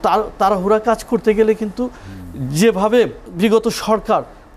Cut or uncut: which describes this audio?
cut